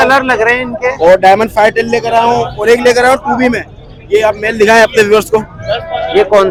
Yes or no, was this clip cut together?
no